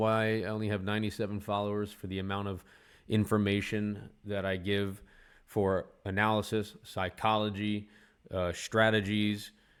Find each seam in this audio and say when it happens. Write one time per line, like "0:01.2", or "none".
none